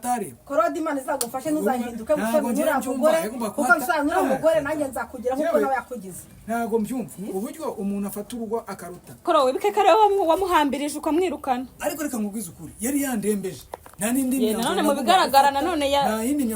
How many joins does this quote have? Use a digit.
1